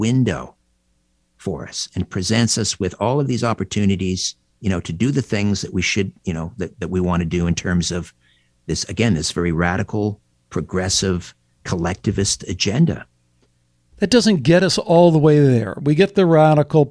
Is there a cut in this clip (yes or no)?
yes